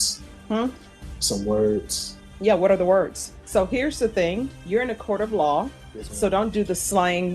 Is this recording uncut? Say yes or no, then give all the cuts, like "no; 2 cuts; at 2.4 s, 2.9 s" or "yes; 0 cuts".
no; 2 cuts; at 3.3 s, 4.5 s